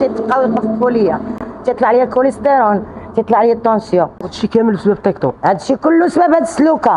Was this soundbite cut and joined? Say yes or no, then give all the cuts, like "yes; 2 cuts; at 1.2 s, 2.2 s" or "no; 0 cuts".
yes; 1 cut; at 4.4 s